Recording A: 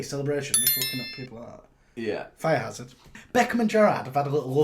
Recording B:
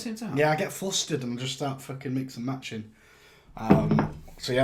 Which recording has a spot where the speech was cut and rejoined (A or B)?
A